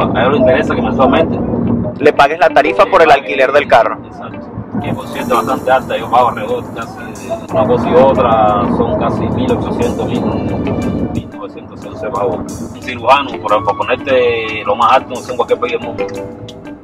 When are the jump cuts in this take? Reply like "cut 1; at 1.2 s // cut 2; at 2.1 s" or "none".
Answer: cut 1; at 7.4 s // cut 2; at 12.8 s